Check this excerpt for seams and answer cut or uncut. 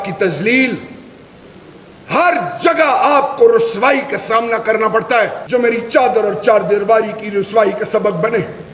cut